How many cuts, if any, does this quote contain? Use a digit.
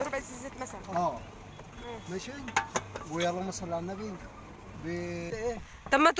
1